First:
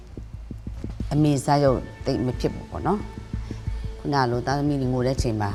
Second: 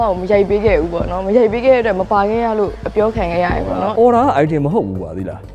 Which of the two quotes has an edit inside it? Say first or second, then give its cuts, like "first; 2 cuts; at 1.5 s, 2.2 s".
second; 1 cut; at 3.9 s